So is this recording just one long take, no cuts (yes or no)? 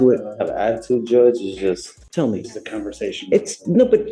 no